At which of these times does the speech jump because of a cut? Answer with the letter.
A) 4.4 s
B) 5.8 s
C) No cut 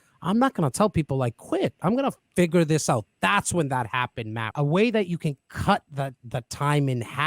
A